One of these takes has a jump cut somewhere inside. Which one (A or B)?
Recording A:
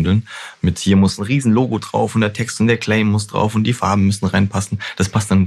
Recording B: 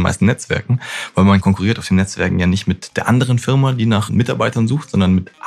B